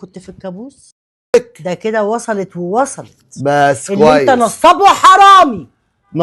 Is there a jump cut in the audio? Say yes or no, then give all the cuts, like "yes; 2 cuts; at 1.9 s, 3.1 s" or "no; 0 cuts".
yes; 1 cut; at 1.3 s